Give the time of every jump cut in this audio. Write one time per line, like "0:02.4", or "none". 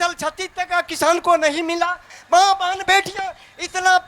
0:02.1